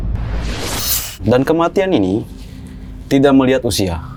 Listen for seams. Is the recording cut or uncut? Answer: uncut